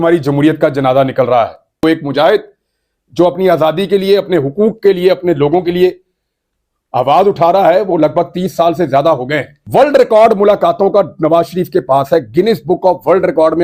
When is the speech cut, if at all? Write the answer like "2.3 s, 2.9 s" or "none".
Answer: 1.8 s, 9.6 s